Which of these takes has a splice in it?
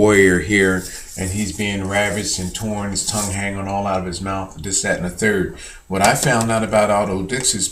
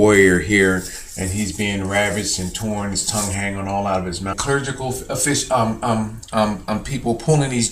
first; 1 cut; at 4.3 s

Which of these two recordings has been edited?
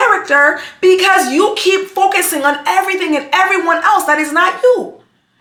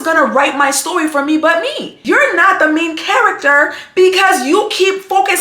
second; 1 cut; at 1.9 s

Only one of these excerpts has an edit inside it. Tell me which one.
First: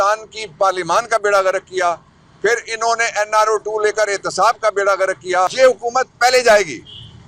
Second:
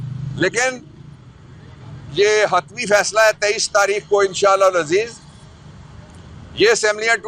first; 1 cut; at 5.5 s

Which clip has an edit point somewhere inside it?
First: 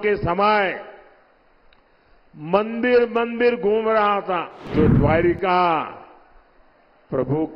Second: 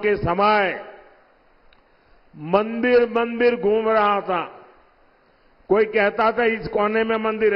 first; 1 cut; at 4.7 s

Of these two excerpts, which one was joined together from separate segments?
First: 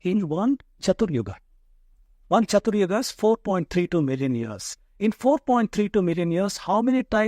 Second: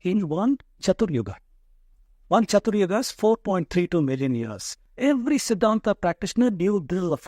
second; 1 cut; at 4.8 s

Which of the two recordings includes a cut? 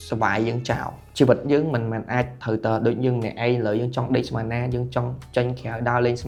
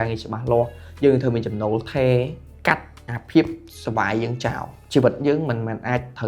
second; 1 cut; at 2.4 s

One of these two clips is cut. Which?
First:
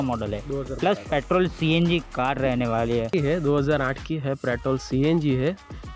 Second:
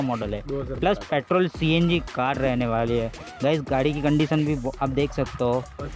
first; 1 cut; at 3.1 s

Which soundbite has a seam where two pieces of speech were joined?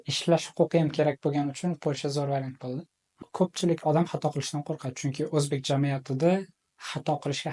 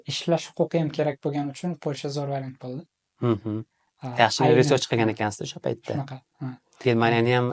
first; 1 cut; at 3.0 s

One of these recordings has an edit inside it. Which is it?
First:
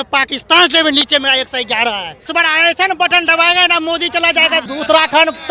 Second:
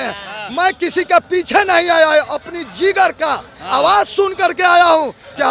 first; 2 cuts; at 2.2 s, 4.7 s

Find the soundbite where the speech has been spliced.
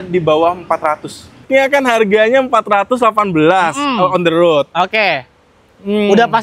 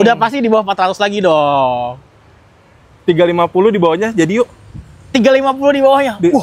first; 1 cut; at 1.4 s

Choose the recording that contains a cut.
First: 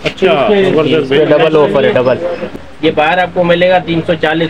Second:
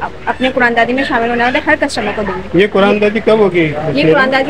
first; 1 cut; at 2.4 s

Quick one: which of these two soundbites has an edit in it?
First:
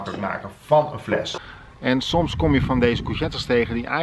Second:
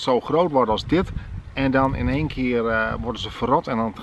first; 1 cut; at 1.3 s

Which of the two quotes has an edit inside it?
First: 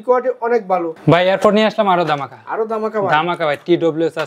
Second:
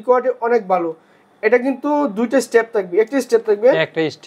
first; 1 cut; at 0.9 s

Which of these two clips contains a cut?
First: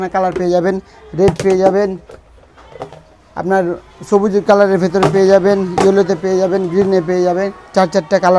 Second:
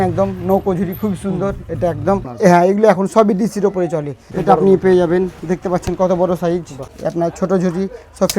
second; 3 cuts; at 2.3 s, 4.2 s, 6.8 s

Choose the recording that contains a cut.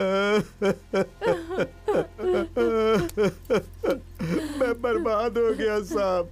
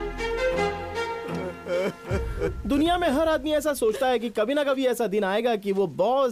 first; 1 cut; at 2.2 s

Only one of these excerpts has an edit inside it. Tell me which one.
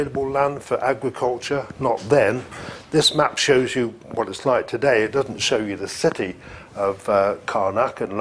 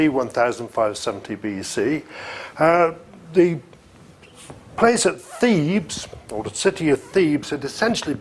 second; 1 cut; at 6.8 s

